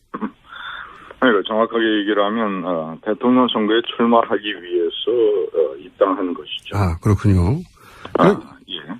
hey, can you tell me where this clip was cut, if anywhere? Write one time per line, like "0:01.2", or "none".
0:07.0